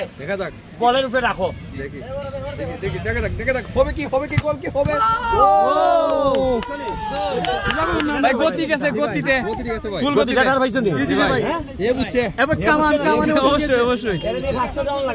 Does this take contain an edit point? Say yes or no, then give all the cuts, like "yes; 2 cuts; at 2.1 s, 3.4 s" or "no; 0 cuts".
no; 0 cuts